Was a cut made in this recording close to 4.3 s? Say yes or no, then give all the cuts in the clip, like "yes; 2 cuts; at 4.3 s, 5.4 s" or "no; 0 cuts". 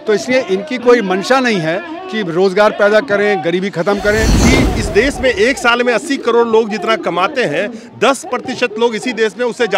yes; 1 cut; at 4.3 s